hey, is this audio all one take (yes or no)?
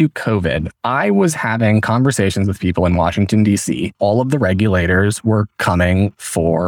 no